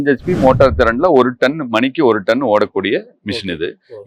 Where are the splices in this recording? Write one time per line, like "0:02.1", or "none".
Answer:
none